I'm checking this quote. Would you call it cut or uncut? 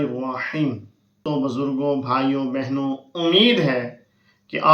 cut